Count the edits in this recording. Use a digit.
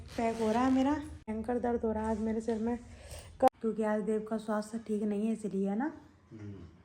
2